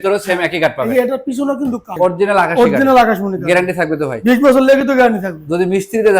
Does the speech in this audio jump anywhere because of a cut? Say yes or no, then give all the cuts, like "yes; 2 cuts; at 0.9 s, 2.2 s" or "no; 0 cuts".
yes; 1 cut; at 1.9 s